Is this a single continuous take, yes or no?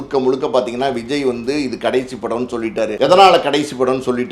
no